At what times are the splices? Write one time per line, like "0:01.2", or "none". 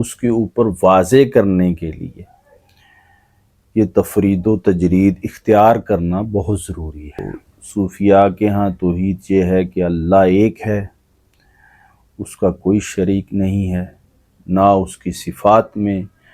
0:07.2